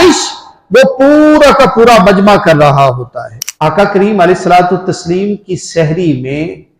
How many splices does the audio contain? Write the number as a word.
one